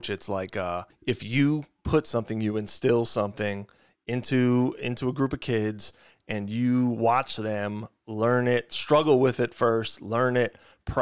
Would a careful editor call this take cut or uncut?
cut